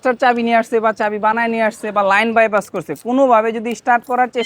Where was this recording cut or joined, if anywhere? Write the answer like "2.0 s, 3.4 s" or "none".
none

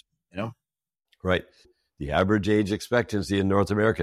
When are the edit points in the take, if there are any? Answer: 1.7 s

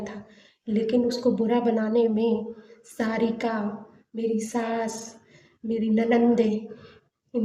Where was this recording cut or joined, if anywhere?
none

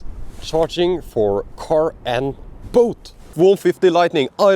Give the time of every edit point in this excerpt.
3.2 s

